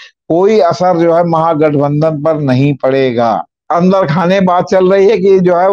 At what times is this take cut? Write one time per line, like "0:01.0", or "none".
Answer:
0:03.6